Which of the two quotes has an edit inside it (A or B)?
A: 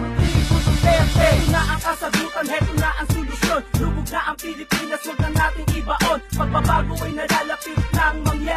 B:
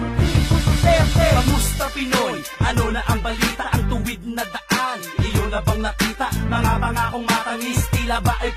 B